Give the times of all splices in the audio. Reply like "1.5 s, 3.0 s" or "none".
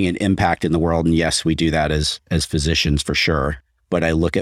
none